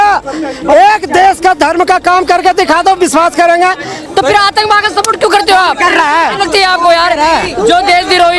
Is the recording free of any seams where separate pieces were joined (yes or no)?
no